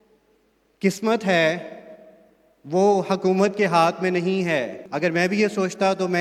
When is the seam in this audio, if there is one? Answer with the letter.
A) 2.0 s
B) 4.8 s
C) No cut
B